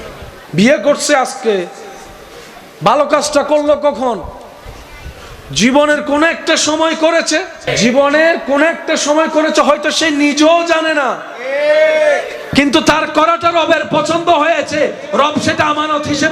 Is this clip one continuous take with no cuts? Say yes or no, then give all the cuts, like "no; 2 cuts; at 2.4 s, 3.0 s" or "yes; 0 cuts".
no; 1 cut; at 7.6 s